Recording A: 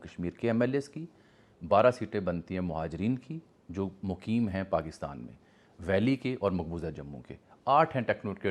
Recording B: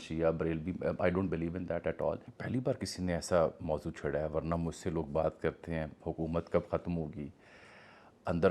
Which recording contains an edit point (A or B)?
B